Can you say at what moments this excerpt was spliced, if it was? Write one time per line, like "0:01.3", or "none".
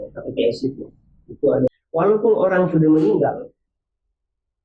0:01.7